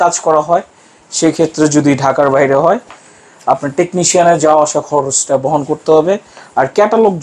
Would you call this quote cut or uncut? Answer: uncut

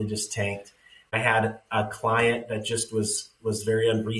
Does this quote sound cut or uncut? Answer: cut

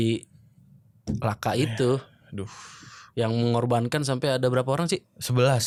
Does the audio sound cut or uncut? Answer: uncut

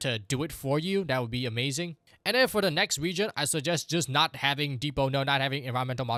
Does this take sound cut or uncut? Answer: uncut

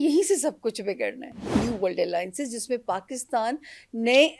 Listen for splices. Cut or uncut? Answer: cut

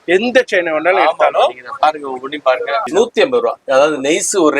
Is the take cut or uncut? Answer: cut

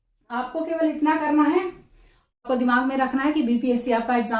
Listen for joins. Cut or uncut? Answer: cut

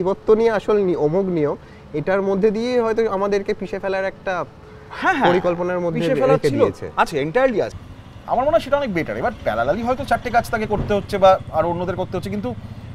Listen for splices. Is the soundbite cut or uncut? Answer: cut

